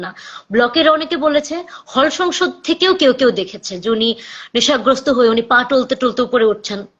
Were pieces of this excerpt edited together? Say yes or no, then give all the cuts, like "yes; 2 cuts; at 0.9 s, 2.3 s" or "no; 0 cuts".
no; 0 cuts